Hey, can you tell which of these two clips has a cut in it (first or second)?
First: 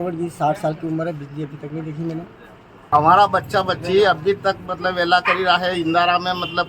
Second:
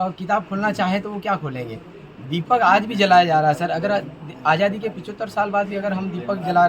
first